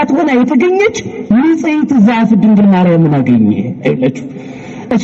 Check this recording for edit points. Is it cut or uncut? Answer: uncut